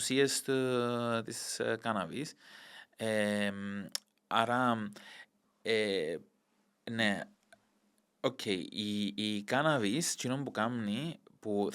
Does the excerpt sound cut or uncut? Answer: uncut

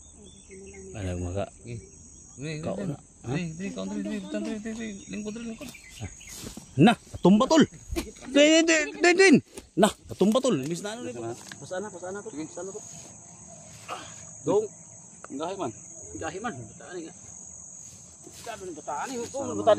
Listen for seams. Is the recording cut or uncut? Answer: cut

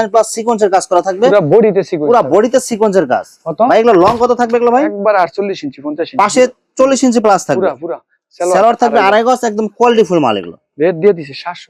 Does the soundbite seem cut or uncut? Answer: uncut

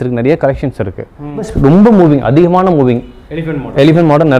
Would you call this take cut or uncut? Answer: cut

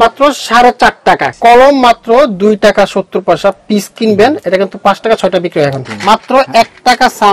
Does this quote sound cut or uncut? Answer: cut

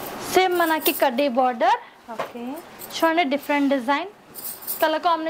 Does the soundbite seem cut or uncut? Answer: uncut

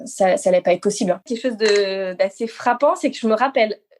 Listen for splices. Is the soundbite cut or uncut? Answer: cut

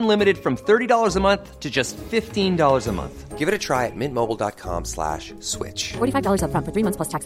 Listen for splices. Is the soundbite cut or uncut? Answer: uncut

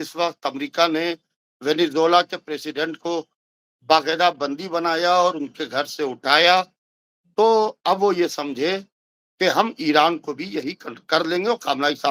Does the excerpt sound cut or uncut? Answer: uncut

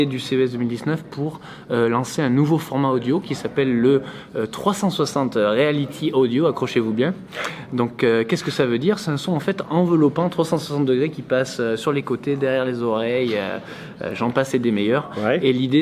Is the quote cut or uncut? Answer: uncut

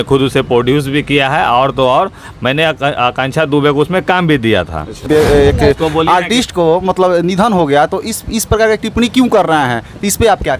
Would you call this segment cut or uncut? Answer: cut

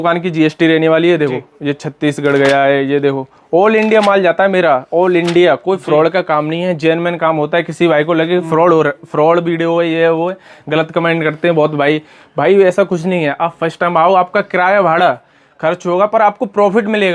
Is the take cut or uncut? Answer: uncut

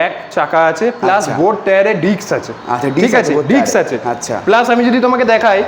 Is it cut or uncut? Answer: uncut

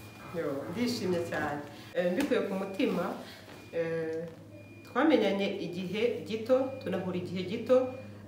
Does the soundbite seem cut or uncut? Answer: cut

